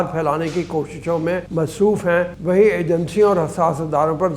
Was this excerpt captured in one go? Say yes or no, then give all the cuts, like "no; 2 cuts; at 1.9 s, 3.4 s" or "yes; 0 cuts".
no; 2 cuts; at 1.5 s, 2.4 s